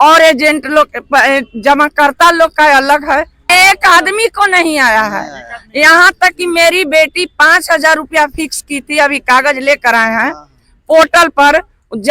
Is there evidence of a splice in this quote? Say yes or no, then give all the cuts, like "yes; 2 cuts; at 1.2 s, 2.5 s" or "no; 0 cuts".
yes; 1 cut; at 3.4 s